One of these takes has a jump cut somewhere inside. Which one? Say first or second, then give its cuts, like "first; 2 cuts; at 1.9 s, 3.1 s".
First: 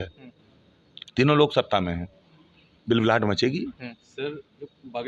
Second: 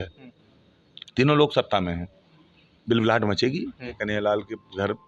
second; 1 cut; at 3.9 s